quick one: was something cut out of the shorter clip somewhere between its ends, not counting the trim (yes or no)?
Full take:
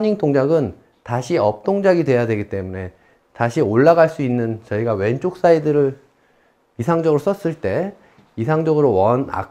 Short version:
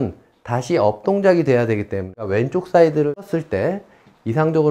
yes